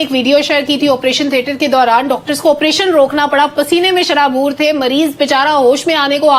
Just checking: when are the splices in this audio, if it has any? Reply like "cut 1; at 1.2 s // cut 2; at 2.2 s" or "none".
none